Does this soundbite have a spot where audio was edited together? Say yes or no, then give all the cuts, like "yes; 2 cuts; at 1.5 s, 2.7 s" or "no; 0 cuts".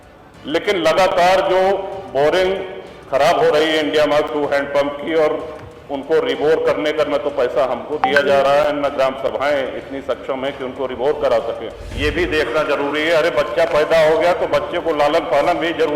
yes; 1 cut; at 11.9 s